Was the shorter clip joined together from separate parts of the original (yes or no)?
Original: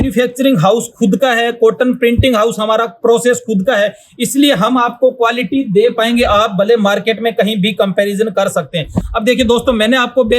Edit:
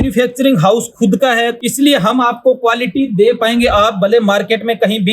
yes